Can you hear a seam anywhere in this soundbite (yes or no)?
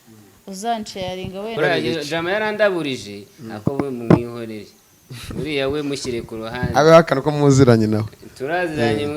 yes